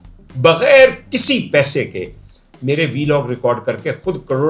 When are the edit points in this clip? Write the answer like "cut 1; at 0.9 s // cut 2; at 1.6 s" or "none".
none